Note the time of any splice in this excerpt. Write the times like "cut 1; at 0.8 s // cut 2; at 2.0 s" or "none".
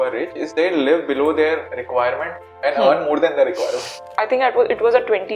cut 1; at 4.0 s